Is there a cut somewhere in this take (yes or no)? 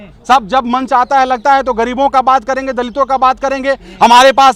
no